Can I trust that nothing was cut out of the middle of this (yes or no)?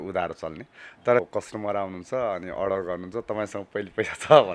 no